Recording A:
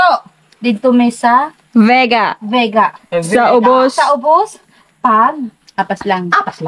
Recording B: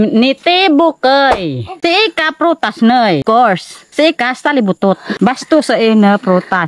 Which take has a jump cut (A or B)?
B